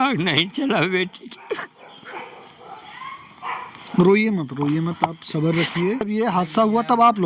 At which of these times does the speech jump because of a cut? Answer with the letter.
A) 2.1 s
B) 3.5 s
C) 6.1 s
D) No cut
C